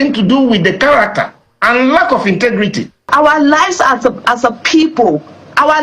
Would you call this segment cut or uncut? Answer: cut